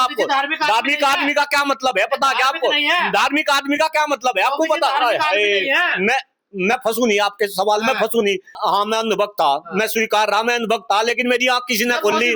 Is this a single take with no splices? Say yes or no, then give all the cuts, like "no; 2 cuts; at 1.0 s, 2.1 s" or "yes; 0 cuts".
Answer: no; 1 cut; at 8.6 s